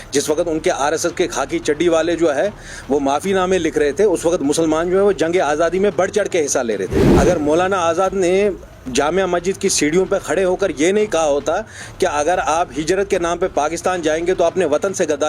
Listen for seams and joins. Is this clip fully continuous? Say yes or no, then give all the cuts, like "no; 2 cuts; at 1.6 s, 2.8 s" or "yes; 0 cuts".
no; 1 cut; at 7.0 s